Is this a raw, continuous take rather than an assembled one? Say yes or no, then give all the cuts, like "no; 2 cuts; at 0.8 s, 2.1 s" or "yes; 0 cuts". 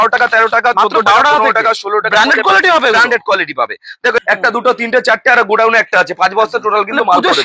no; 1 cut; at 4.2 s